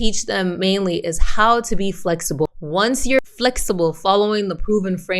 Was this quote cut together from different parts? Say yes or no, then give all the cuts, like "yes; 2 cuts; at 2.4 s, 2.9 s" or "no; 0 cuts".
yes; 1 cut; at 2.6 s